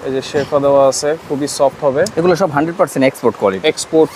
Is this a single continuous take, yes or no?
yes